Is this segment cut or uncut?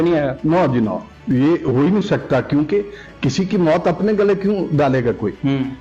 uncut